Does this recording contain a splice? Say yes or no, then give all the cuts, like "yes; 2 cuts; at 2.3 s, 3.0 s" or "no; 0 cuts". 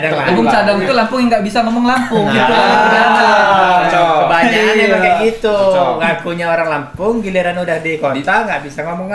no; 0 cuts